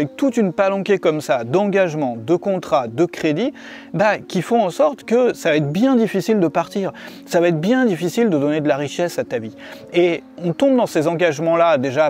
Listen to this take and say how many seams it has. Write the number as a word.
zero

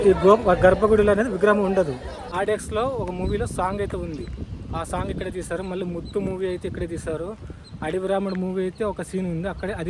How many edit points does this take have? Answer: one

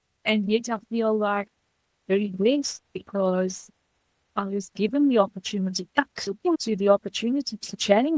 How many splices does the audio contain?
one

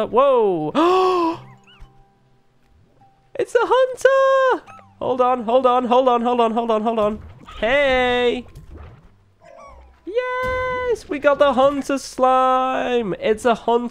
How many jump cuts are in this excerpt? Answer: zero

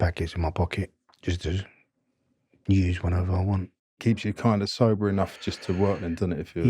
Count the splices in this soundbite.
two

